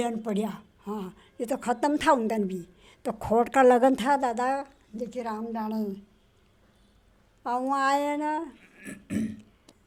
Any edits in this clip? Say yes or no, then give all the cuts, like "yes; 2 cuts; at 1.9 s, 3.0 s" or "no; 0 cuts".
no; 0 cuts